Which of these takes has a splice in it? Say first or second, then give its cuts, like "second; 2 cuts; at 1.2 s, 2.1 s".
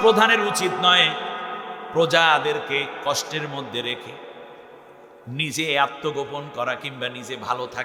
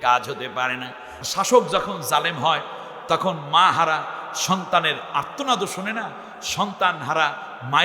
second; 1 cut; at 1.2 s